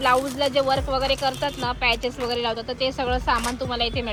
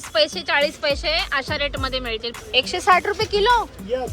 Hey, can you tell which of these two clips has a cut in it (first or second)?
second